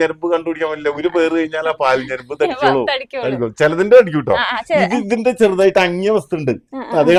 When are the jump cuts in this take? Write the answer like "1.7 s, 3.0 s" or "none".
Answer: none